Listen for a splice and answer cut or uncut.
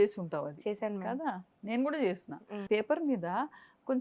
cut